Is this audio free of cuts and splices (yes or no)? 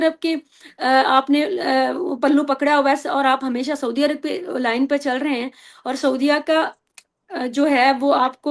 yes